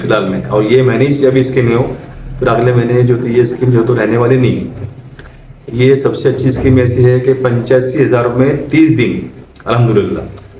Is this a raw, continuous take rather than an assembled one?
yes; 0 cuts

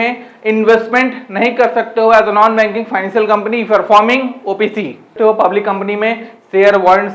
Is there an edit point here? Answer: yes; 1 cut; at 5.1 s

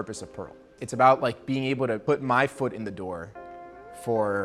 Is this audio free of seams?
no; 1 cut; at 2.0 s

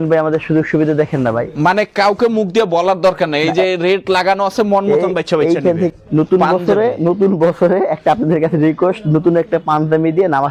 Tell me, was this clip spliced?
yes; 1 cut; at 5.9 s

